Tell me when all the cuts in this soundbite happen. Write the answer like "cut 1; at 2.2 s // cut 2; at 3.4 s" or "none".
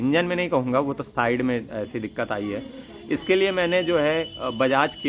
none